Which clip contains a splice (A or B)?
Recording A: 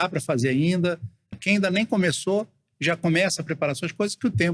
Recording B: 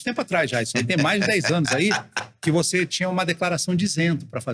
A